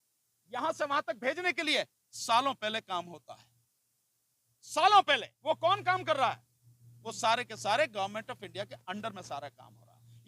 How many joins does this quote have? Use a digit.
1